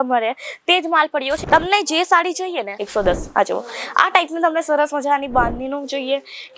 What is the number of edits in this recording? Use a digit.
2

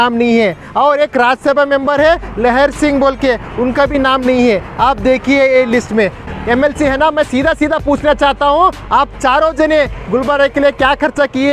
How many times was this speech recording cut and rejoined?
1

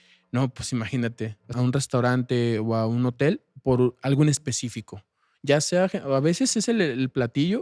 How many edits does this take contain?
1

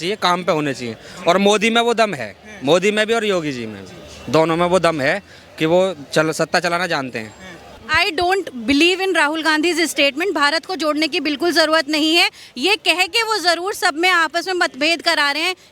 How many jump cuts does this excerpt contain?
1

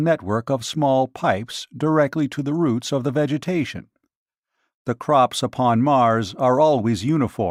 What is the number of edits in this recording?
0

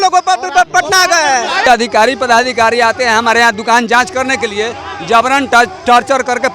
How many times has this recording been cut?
1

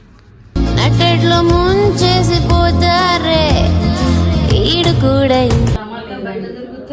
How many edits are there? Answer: 1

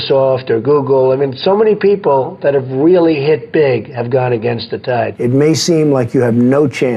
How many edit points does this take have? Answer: 1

